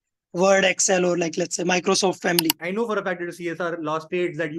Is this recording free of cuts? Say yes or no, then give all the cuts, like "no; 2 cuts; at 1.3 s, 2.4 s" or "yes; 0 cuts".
no; 1 cut; at 2.6 s